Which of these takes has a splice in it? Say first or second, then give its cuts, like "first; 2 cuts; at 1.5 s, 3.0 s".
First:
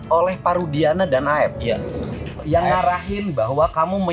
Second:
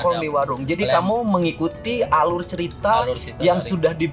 first; 1 cut; at 2.4 s